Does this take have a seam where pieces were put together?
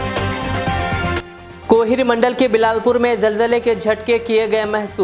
no; 0 cuts

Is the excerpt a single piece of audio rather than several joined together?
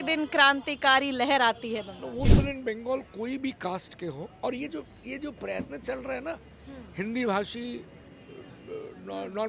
no; 1 cut; at 2.3 s

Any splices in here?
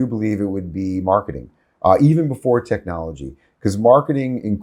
no; 0 cuts

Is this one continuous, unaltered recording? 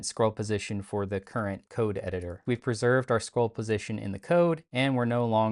no; 1 cut; at 2.4 s

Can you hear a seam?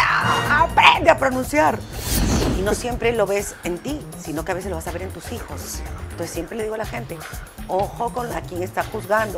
yes; 1 cut; at 2.4 s

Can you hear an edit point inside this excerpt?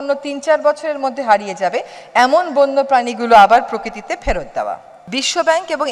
yes; 1 cut; at 4.9 s

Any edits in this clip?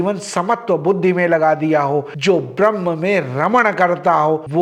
no; 0 cuts

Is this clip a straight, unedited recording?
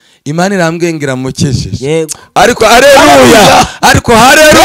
yes; 0 cuts

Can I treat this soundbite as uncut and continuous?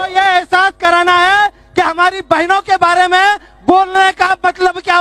yes; 0 cuts

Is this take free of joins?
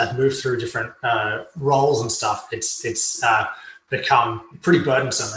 no; 1 cut; at 4.5 s

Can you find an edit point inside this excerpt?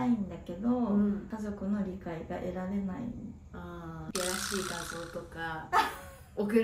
yes; 1 cut; at 4.0 s

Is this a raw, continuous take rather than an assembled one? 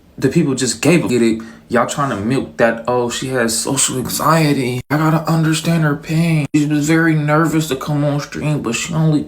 no; 1 cut; at 1.1 s

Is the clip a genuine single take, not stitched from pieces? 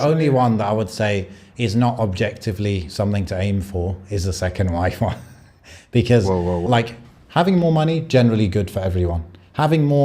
no; 1 cut; at 6.6 s

